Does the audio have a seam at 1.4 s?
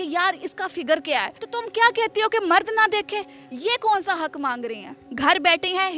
yes; 2 cuts; at 1.4 s, 5.0 s

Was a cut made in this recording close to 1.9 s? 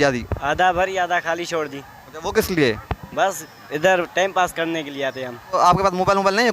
yes; 2 cuts; at 1.9 s, 5.5 s

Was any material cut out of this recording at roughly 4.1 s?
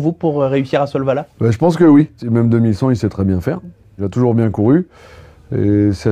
yes; 2 cuts; at 2.2 s, 4.1 s

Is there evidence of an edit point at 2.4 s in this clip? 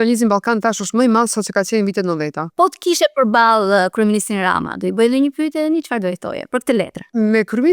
yes; 2 cuts; at 2.4 s, 6.6 s

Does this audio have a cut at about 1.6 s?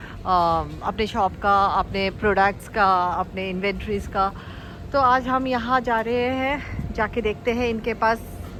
no; 0 cuts

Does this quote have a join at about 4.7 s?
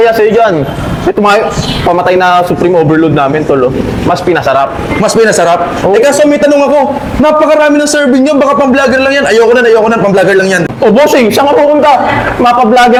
no; 0 cuts

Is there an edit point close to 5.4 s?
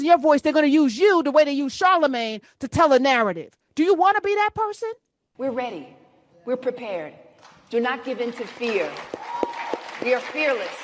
yes; 1 cut; at 5.4 s

